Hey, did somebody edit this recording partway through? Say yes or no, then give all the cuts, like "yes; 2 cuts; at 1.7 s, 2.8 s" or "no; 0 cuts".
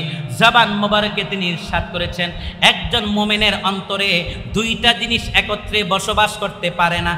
no; 0 cuts